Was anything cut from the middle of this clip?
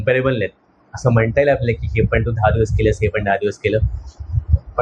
no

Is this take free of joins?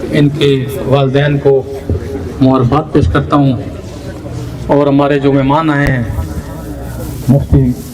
yes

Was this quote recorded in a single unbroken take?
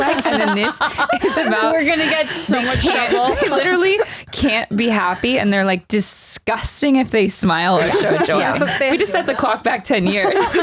no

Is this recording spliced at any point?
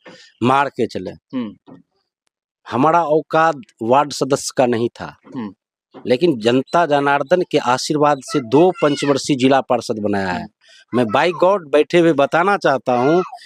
no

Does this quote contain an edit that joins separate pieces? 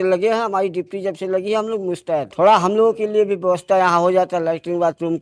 yes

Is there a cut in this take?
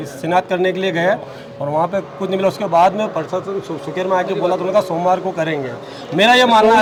no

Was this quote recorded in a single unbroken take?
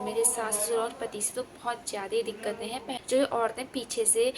no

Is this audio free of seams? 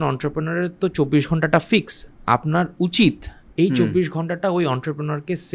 yes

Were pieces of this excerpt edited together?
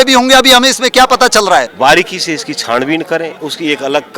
yes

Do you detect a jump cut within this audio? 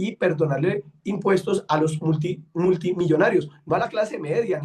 no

